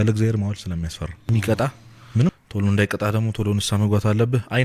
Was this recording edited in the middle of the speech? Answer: yes; 1 cut; at 1.3 s

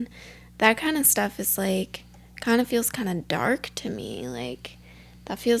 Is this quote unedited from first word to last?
yes; 0 cuts

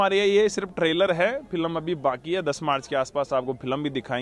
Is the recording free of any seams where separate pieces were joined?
yes; 0 cuts

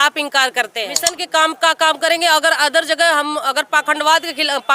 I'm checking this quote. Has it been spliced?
yes; 1 cut; at 1.1 s

